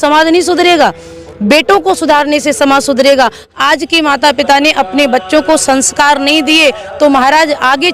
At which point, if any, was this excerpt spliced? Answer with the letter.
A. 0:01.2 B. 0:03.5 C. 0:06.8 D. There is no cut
B